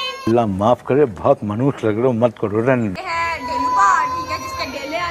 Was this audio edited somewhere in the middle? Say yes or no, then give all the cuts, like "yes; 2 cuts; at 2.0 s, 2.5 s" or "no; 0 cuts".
yes; 1 cut; at 3.0 s